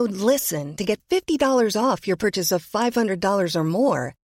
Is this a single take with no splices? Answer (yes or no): yes